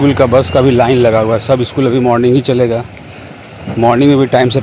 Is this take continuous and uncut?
yes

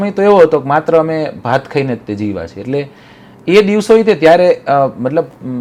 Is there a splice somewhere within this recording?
no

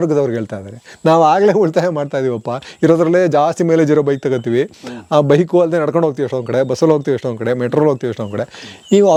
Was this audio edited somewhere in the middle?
no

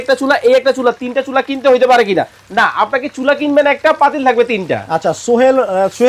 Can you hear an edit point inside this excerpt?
no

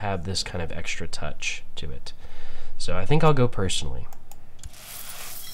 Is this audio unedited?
yes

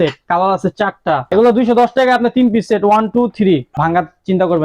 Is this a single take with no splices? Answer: no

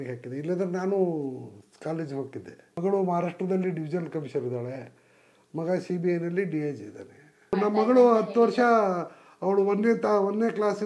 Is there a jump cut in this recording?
yes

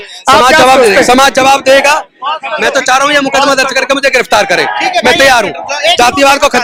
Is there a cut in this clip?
no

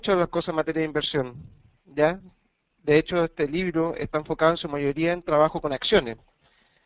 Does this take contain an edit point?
no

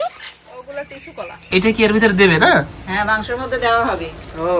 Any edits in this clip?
yes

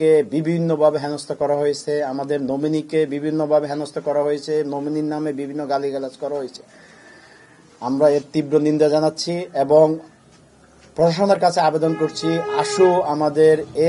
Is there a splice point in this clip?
no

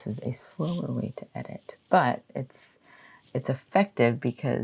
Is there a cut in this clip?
no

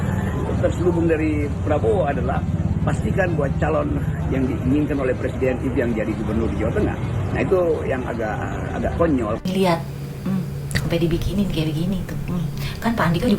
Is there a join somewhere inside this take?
yes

